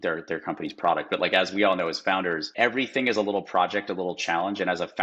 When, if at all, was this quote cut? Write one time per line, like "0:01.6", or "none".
0:02.5